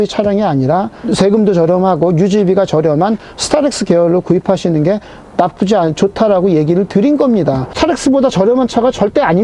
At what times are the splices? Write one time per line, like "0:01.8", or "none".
0:01.0
0:07.7